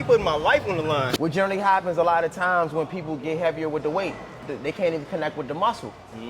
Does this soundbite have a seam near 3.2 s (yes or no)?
no